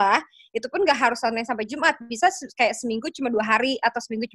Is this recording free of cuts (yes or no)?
yes